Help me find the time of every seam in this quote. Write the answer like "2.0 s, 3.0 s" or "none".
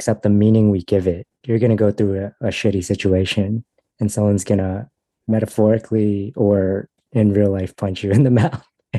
1.4 s

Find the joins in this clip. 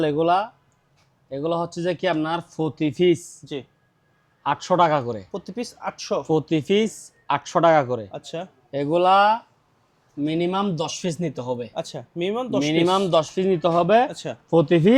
none

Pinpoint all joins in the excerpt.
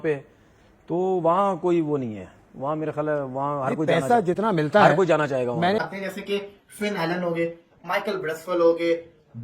5.9 s

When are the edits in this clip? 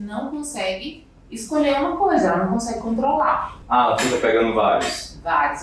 3.5 s

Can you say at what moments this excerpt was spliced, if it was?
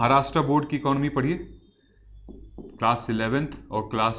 none

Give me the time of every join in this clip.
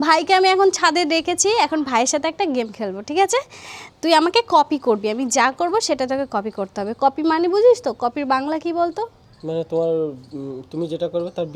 none

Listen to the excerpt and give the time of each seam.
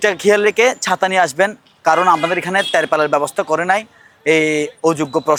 none

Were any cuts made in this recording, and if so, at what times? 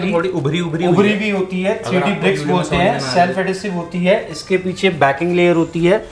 none

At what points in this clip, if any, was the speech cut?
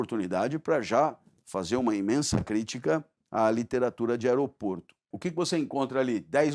5.1 s

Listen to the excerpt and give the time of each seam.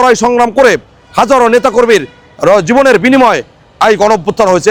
none

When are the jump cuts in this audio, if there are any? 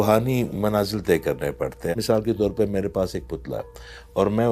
1.9 s

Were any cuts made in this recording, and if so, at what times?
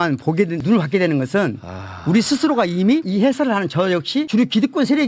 none

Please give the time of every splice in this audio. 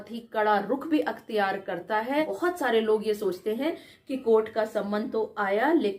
2.3 s

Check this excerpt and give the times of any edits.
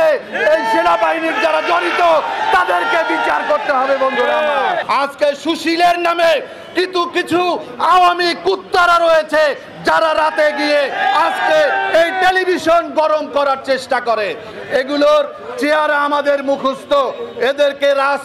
4.8 s

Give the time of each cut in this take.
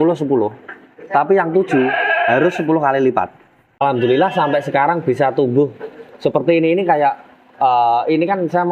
3.8 s

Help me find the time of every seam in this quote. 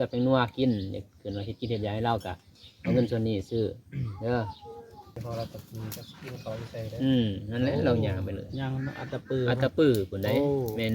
5.2 s

